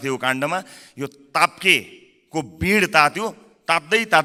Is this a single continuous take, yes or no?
yes